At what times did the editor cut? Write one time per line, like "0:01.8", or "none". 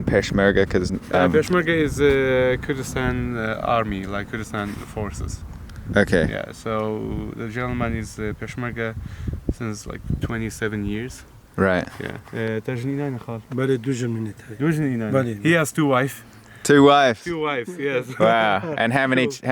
none